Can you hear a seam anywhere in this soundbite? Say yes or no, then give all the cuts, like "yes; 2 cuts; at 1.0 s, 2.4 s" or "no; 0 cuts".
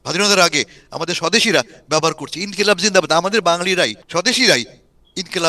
yes; 1 cut; at 4.0 s